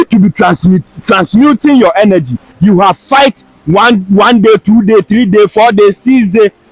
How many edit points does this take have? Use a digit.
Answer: 1